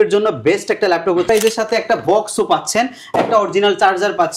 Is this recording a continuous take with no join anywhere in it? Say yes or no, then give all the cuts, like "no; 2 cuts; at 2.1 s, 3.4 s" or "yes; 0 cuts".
no; 1 cut; at 1.3 s